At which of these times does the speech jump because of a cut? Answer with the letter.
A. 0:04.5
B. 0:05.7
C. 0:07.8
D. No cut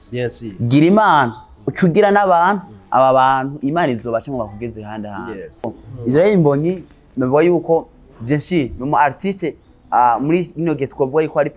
B